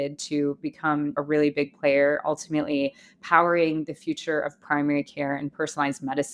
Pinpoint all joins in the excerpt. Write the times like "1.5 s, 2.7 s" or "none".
1.2 s